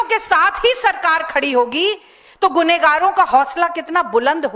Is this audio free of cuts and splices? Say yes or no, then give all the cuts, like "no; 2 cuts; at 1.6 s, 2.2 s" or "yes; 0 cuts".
yes; 0 cuts